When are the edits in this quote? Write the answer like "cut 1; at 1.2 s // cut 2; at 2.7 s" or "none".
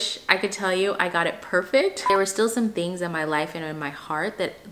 cut 1; at 2.1 s

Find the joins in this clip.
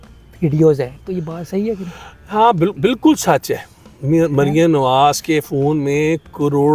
none

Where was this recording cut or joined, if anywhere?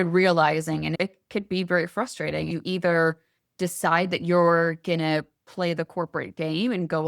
cut 1; at 2.5 s

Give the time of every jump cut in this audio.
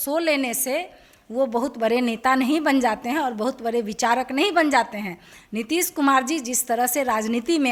none

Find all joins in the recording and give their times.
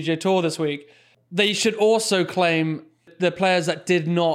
cut 1; at 3.1 s

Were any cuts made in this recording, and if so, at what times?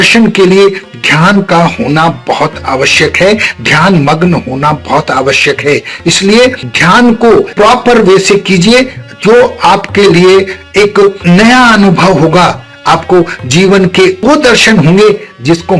none

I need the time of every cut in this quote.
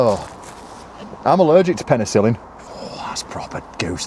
cut 1; at 2.6 s

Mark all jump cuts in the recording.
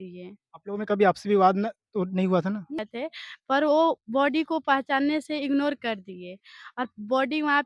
cut 1; at 2.8 s

